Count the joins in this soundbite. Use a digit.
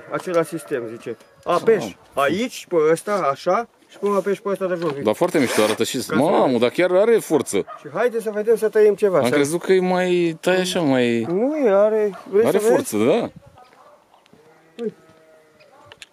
0